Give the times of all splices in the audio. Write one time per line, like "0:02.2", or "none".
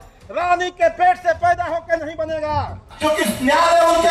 0:02.8